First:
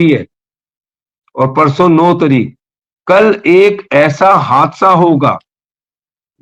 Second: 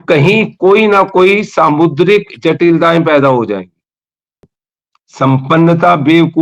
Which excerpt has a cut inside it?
second; 1 cut; at 4.5 s

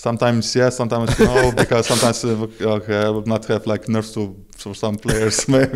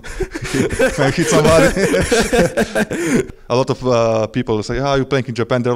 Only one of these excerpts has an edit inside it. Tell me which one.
second; 1 cut; at 3.4 s

